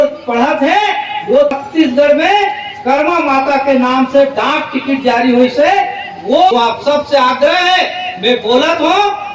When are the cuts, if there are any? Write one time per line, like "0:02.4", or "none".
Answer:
0:01.5
0:06.5